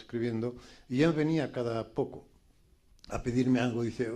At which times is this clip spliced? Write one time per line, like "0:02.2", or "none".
0:02.2